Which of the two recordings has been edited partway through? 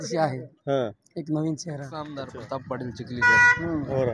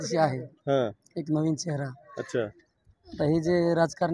first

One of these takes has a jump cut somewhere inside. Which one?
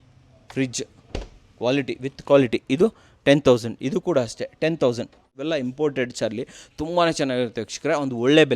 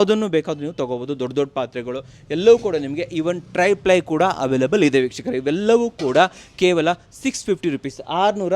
first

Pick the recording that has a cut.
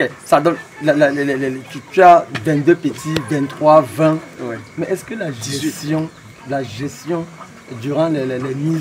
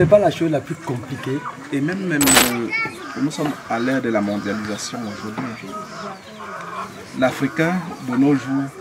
second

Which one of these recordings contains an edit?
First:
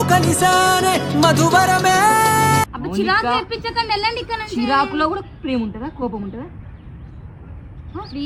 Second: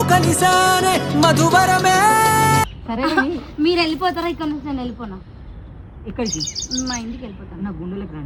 second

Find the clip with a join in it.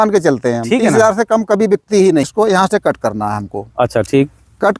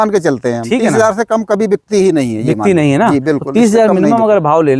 first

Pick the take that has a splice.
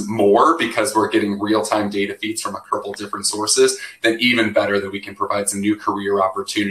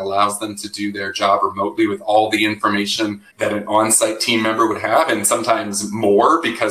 second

